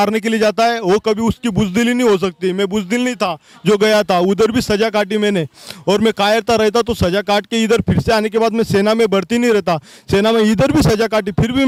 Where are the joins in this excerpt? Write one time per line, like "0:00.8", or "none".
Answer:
none